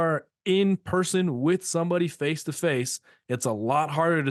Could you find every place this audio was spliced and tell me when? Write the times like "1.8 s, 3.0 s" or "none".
none